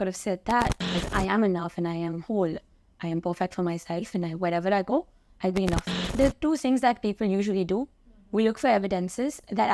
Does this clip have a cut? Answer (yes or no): yes